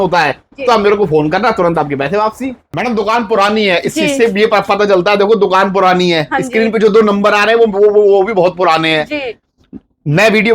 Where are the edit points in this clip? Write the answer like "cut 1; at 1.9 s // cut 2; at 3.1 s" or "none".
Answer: cut 1; at 2.7 s